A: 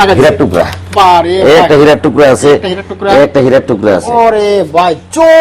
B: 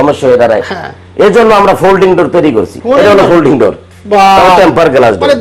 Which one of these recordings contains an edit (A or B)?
B